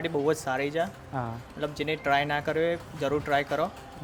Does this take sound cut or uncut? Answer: uncut